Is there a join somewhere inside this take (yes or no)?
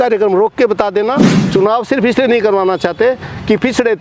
yes